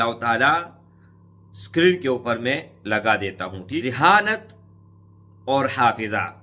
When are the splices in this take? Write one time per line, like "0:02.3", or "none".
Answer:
0:03.8

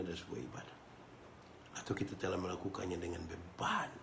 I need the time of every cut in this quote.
0:01.3

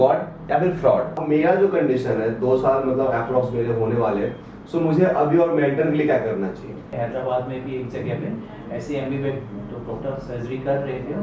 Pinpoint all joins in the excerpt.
0:01.2
0:06.9

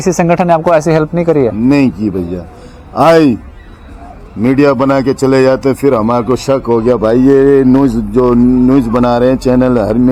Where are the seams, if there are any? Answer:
none

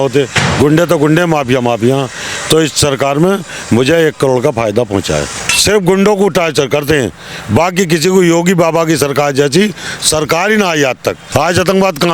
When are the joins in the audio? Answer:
0:05.4
0:11.2

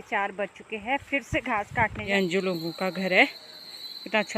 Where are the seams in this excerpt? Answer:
0:02.0

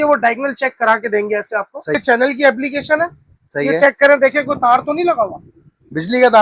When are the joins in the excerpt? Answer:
0:02.0

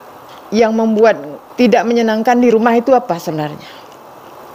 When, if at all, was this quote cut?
0:01.5

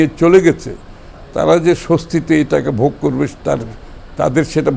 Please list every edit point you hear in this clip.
none

